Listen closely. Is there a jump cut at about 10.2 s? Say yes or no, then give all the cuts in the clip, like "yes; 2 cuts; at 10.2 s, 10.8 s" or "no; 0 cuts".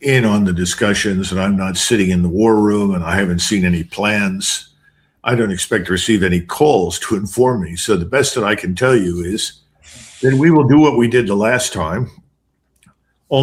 no; 0 cuts